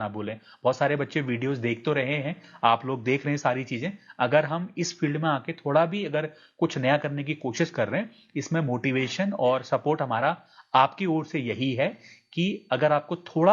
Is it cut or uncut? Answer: uncut